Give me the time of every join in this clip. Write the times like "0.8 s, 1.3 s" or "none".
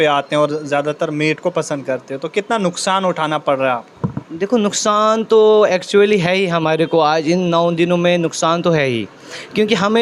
none